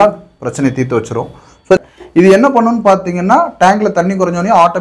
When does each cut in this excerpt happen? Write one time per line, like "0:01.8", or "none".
0:01.8

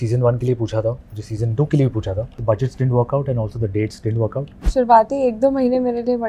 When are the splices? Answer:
0:02.3
0:04.7

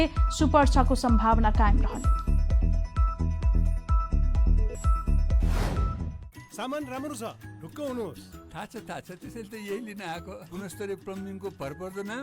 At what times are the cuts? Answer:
0:06.1

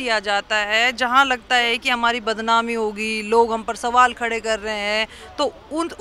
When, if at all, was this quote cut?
none

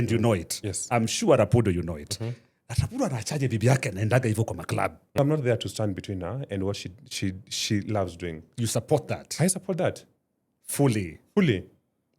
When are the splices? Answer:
0:05.2

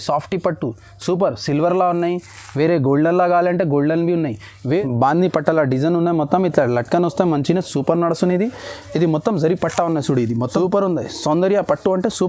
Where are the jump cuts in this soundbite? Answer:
0:04.7
0:10.4

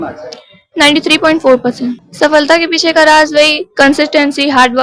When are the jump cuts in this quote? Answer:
0:02.0

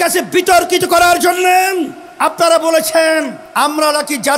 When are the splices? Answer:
0:02.0
0:03.4

